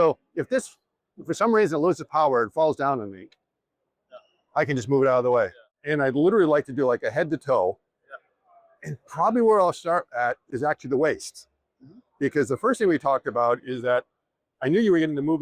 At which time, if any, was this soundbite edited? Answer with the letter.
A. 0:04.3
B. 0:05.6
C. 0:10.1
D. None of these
B